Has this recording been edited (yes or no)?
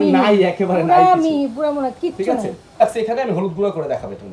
yes